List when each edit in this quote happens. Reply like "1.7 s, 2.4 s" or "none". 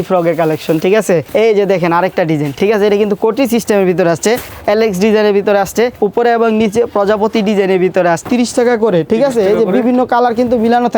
1.2 s, 2.5 s, 4.5 s, 5.9 s, 8.3 s